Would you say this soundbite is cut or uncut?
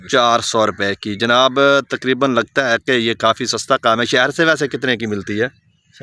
uncut